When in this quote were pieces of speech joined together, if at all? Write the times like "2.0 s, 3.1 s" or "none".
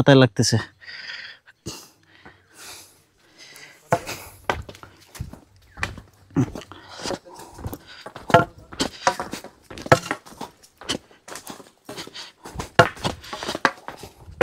none